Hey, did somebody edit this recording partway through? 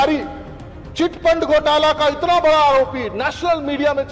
no; 0 cuts

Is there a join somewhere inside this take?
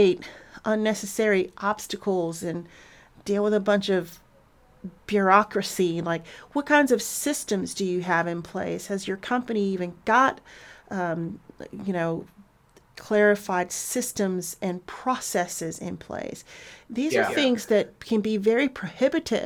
no; 0 cuts

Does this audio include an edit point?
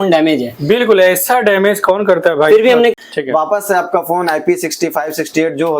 yes; 1 cut; at 2.9 s

